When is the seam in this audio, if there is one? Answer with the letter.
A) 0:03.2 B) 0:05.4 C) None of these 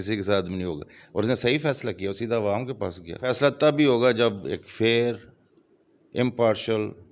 A